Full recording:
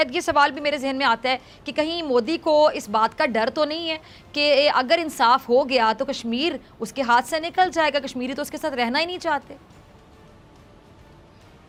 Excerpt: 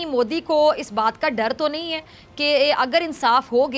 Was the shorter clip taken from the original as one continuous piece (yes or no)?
yes